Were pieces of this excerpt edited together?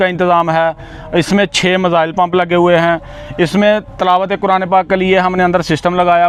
no; 0 cuts

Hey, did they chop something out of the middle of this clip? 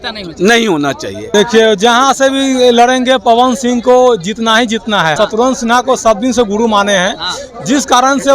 yes; 2 cuts; at 1.3 s, 5.1 s

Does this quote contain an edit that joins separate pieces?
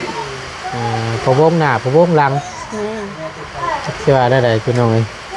no; 0 cuts

